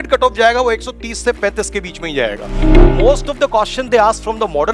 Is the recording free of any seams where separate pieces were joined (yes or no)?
no